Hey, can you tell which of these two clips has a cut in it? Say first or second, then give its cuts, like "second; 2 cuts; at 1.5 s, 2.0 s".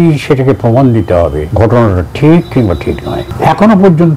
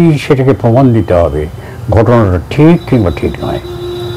first; 2 cuts; at 1.4 s, 3.3 s